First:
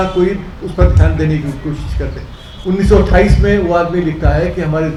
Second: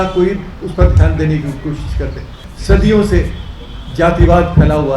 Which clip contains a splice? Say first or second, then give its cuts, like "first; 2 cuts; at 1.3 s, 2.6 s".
second; 1 cut; at 2.4 s